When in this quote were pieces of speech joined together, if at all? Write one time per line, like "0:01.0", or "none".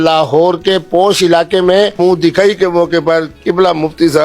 0:01.9